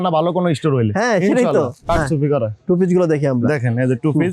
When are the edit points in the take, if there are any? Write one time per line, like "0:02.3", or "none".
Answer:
0:01.8